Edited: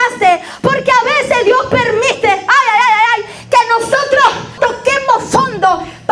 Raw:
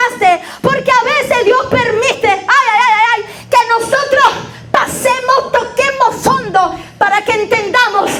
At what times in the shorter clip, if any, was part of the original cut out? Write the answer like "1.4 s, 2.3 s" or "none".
4.5 s